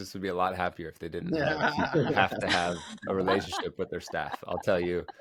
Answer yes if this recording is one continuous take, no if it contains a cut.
yes